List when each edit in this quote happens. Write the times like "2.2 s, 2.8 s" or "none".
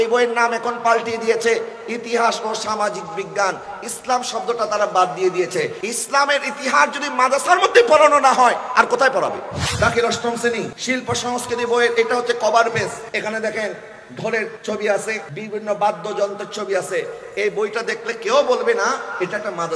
5.8 s, 9.6 s, 10.8 s, 13.0 s, 14.6 s, 15.3 s